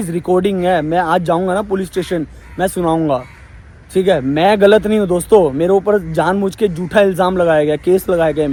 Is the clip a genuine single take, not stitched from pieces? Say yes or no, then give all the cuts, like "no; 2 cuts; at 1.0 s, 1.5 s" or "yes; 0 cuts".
yes; 0 cuts